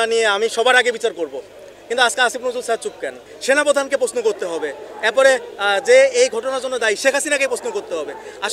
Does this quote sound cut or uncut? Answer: cut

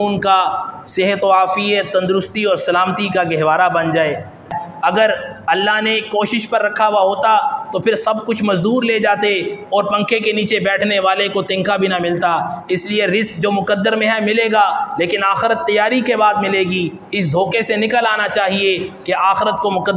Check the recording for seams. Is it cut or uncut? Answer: cut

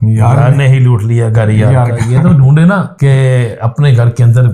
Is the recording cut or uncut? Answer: cut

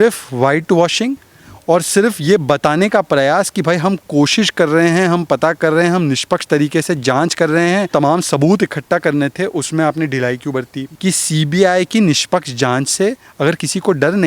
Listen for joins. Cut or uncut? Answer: cut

